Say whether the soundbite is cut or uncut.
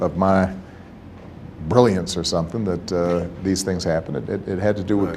uncut